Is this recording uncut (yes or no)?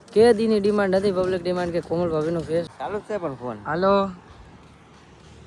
no